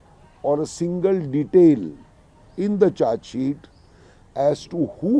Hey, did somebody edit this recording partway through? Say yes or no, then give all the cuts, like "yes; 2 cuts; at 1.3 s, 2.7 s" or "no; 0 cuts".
no; 0 cuts